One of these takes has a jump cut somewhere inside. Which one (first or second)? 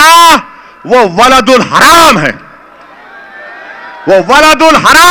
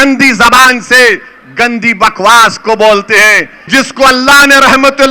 second